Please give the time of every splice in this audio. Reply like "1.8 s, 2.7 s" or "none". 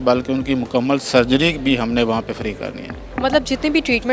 none